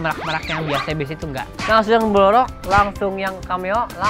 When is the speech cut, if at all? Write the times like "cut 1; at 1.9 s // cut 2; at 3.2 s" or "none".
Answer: cut 1; at 1.6 s